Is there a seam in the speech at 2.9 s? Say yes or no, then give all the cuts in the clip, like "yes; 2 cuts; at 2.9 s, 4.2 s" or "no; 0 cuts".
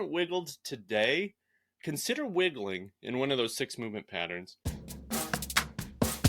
no; 1 cut; at 4.5 s